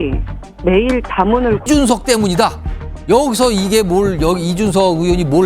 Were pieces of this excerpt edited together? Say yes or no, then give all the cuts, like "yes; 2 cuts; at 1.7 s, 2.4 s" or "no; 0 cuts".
yes; 1 cut; at 1.6 s